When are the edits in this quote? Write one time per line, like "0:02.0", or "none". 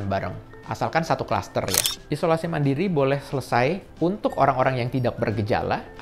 0:01.9